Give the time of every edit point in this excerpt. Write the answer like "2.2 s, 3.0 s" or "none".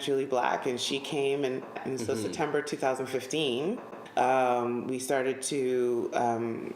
1.8 s, 3.9 s